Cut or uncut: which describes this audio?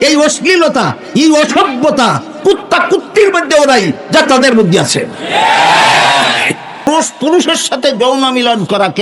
cut